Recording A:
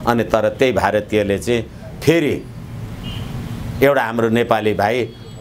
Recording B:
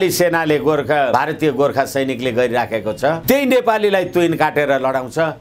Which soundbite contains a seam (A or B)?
B